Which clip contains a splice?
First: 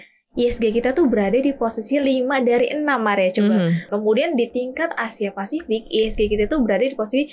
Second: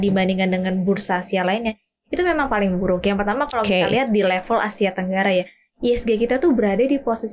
first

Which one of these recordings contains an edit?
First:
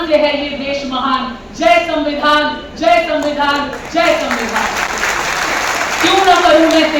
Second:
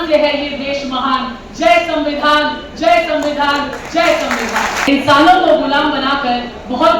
second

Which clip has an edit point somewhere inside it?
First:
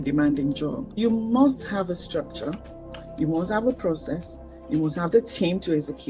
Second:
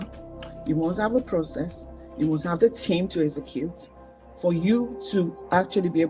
first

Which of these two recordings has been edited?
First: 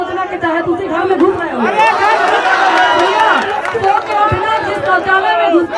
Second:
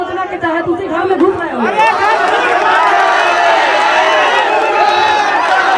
first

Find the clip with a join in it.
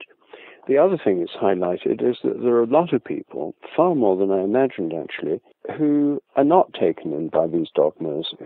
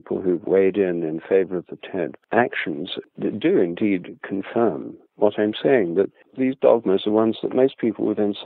second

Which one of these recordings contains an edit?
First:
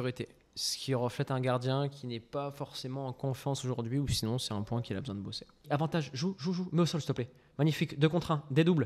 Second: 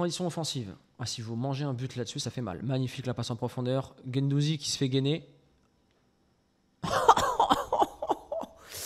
first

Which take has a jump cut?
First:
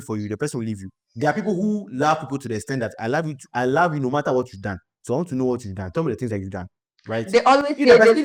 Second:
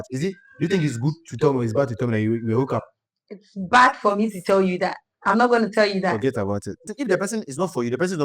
second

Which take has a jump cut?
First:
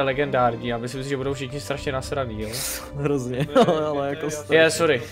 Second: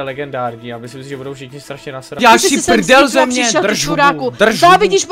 second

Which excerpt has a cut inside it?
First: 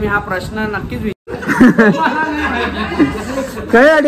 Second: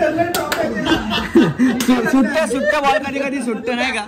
first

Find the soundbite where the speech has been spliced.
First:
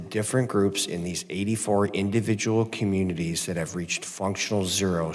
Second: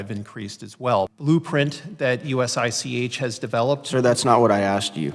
second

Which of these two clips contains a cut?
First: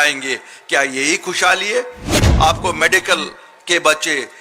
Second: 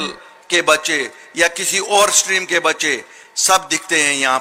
first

